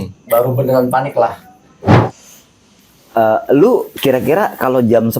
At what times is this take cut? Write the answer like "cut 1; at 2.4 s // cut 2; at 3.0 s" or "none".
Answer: cut 1; at 2.0 s